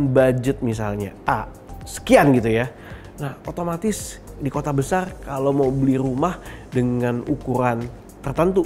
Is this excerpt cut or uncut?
uncut